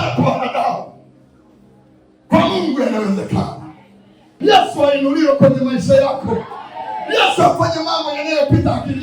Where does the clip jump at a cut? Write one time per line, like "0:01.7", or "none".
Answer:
0:04.3